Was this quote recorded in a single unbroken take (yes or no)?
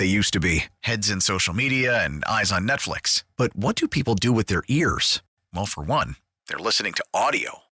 yes